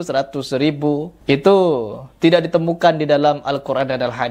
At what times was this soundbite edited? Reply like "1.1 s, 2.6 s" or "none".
none